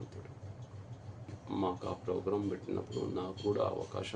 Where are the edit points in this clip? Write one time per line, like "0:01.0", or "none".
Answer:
0:01.4